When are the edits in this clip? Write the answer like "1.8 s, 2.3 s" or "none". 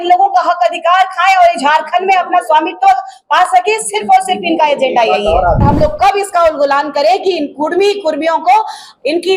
5.6 s